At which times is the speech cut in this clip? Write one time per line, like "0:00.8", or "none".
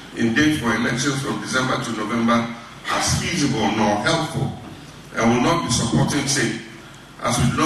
none